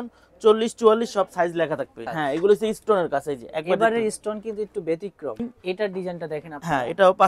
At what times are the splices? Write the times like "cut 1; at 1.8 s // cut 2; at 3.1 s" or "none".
cut 1; at 2.0 s // cut 2; at 5.4 s